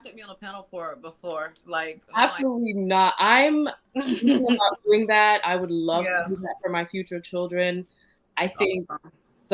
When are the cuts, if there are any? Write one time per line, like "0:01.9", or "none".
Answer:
0:04.8